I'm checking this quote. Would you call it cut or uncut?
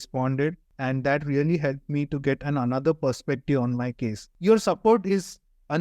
cut